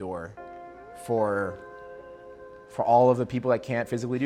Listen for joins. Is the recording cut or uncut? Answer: uncut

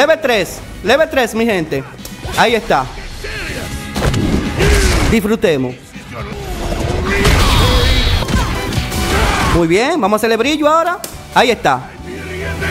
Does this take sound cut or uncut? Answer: cut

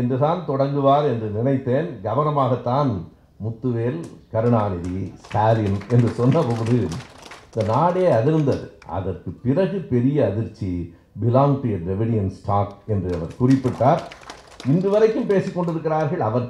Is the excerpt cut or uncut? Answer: uncut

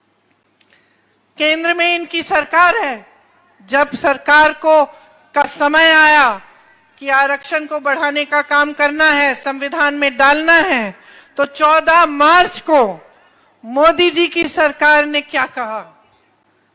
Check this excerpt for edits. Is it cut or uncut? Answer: uncut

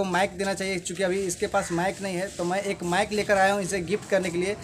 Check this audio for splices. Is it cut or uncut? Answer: uncut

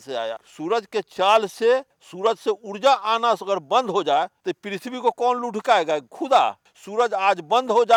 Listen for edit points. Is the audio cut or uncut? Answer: uncut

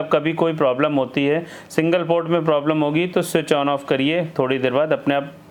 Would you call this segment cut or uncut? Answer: uncut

